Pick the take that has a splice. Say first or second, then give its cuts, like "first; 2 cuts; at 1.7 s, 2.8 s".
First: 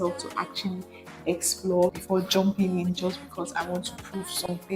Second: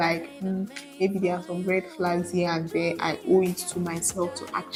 first; 1 cut; at 2.0 s